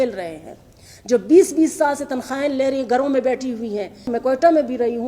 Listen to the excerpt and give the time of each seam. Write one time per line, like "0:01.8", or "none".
0:04.1